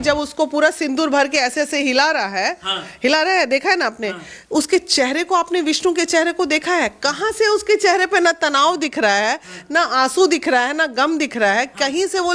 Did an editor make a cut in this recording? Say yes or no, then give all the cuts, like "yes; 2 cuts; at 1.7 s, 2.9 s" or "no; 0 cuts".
no; 0 cuts